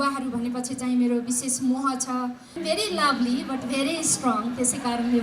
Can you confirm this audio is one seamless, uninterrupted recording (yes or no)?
no